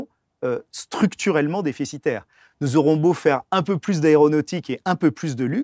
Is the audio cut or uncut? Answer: uncut